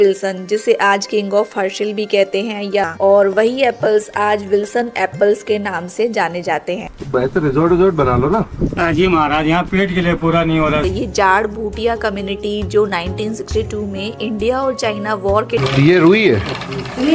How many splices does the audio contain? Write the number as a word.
four